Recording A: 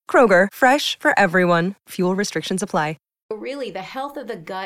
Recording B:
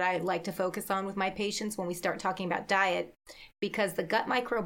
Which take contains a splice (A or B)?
A